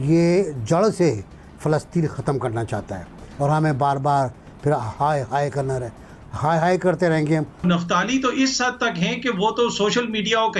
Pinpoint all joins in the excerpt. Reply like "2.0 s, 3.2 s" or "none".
3.2 s, 7.6 s